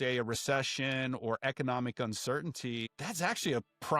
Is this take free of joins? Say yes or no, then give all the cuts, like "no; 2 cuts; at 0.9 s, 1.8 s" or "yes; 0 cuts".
no; 1 cut; at 3.0 s